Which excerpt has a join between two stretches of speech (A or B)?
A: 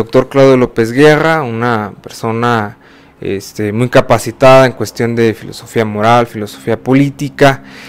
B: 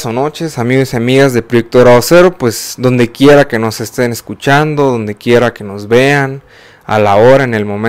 A